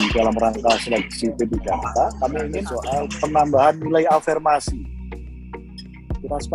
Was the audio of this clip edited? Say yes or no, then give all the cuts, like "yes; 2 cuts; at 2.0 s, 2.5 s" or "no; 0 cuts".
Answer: yes; 1 cut; at 2.7 s